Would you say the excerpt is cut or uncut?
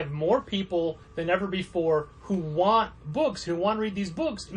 cut